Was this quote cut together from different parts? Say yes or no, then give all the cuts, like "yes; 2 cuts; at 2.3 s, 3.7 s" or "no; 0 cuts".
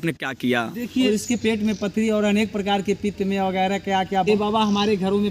yes; 2 cuts; at 1.1 s, 4.3 s